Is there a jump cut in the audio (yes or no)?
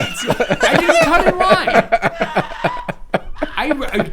no